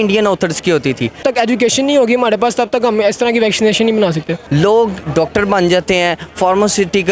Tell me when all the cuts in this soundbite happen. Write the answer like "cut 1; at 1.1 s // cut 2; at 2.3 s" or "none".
cut 1; at 1.2 s // cut 2; at 4.4 s